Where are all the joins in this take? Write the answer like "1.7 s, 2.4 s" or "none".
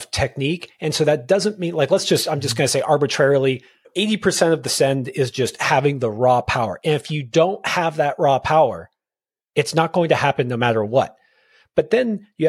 3.9 s